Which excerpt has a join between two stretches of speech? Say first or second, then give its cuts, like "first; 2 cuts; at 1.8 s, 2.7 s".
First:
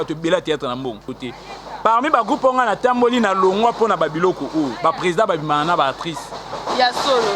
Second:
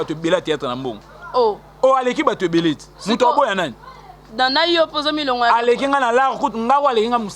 first; 1 cut; at 1.2 s